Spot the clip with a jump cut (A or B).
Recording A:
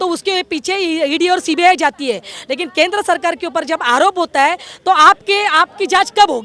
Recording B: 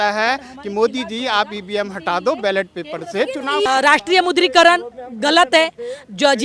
B